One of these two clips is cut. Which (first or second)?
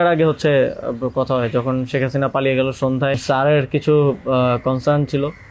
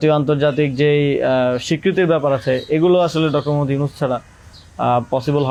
first